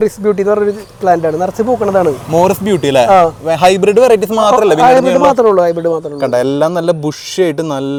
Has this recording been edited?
no; 0 cuts

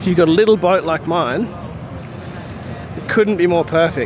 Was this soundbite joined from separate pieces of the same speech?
no; 0 cuts

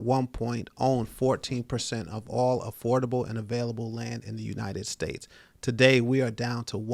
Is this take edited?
no; 0 cuts

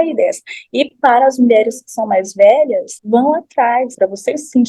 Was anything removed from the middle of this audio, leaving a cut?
yes; 2 cuts; at 2.9 s, 3.9 s

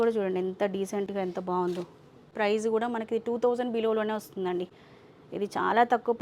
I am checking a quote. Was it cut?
no; 0 cuts

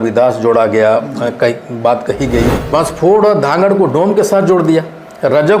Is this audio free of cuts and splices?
no; 1 cut; at 2.6 s

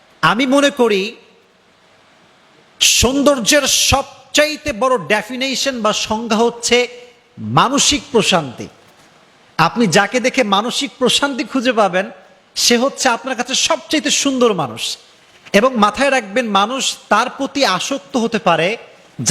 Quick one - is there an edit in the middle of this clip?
no; 0 cuts

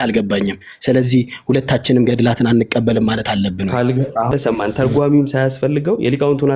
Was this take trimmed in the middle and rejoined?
yes; 1 cut; at 4.3 s

